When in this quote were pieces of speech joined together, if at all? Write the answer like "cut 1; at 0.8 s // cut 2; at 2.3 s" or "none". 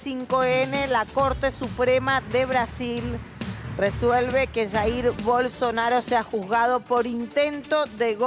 none